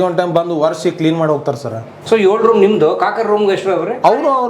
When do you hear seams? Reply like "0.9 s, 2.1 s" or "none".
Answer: 1.9 s